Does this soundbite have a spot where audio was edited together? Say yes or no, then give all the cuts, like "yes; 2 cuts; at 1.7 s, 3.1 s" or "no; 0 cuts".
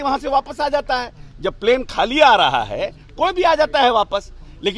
no; 0 cuts